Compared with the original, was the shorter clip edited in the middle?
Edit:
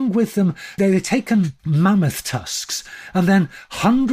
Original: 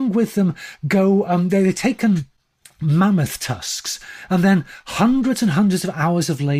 yes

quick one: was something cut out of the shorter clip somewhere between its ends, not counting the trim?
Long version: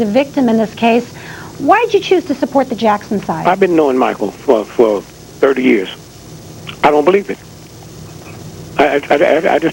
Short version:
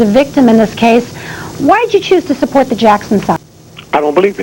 yes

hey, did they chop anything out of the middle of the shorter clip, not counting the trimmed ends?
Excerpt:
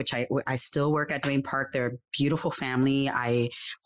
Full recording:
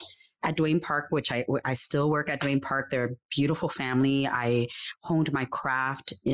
no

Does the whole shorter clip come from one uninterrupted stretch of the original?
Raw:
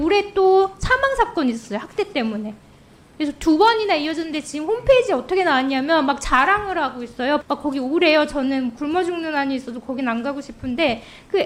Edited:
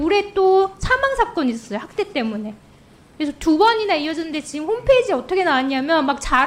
yes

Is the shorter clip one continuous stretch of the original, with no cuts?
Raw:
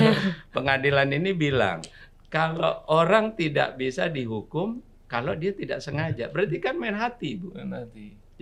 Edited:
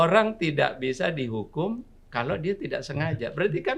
yes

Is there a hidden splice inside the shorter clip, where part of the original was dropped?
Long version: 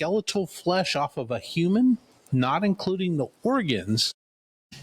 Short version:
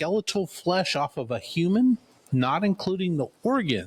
no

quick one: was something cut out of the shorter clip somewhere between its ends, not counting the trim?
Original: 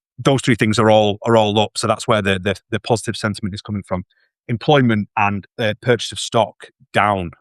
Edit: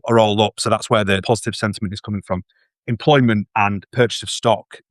yes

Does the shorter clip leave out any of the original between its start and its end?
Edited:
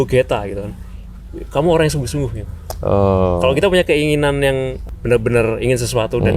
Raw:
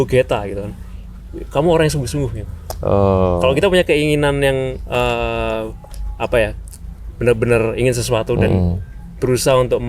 yes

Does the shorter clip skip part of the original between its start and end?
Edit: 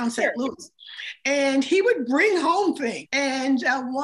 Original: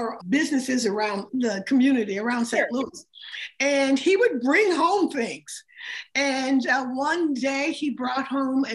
yes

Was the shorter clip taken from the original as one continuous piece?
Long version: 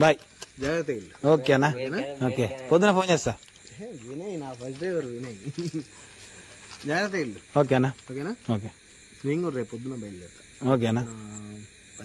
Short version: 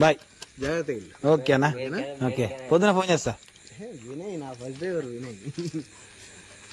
yes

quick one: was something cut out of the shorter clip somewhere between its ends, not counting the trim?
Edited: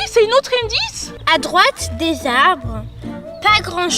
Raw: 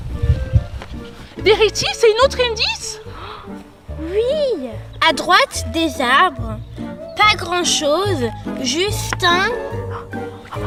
yes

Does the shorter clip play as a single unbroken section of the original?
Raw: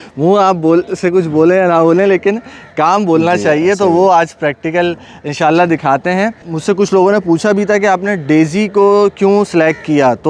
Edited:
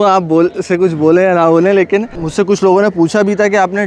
no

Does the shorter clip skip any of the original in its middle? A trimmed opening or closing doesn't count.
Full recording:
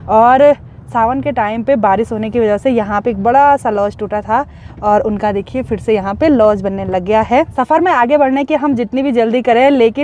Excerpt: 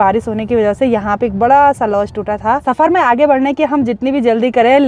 yes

